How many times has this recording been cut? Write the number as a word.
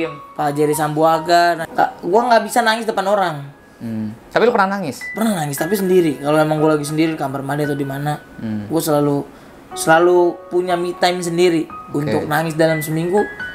one